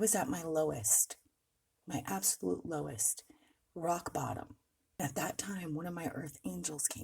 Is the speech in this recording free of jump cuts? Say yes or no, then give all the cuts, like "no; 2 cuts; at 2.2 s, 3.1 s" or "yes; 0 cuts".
no; 1 cut; at 5.0 s